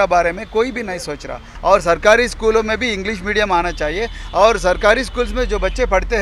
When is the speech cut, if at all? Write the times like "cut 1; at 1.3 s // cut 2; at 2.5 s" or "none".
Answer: cut 1; at 1.5 s